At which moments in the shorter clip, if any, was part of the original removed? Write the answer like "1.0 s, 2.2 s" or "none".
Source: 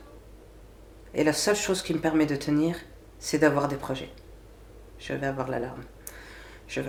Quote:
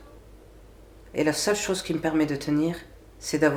none